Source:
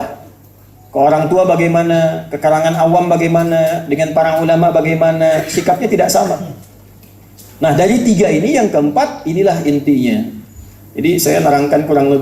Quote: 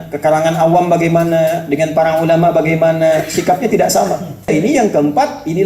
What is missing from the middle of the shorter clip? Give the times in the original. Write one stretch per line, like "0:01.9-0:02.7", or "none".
0:06.7-0:08.3